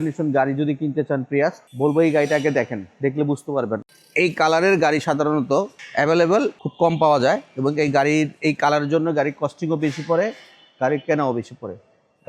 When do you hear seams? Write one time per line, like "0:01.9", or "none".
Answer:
0:03.8
0:05.8
0:06.6